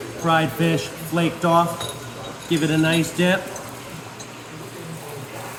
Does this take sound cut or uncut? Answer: uncut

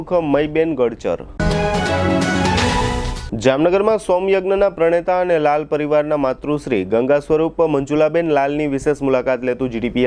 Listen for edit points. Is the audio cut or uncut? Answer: uncut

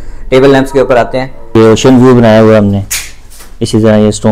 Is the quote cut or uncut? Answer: cut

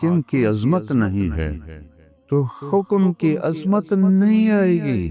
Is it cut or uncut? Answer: uncut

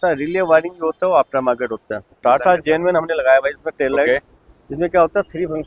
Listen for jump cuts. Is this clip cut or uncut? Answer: cut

